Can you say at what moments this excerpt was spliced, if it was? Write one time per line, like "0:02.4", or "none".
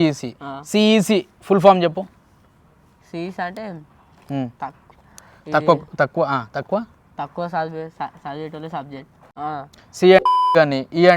0:09.3